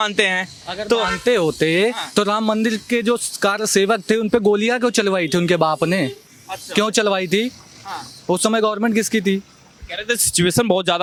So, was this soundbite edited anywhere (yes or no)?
no